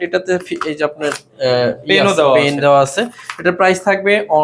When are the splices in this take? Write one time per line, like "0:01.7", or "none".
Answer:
none